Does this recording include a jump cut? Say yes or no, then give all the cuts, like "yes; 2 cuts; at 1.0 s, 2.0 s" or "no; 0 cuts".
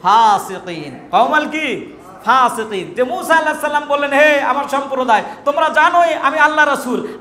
no; 0 cuts